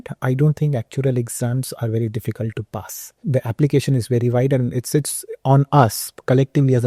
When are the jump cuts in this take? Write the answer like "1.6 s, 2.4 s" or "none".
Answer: 3.1 s